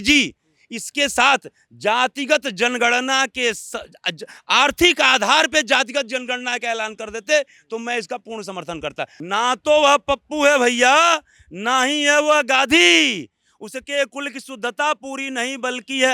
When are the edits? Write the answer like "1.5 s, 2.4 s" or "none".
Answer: 9.1 s